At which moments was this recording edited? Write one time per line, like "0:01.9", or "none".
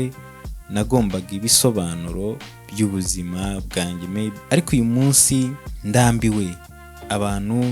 0:04.4
0:05.7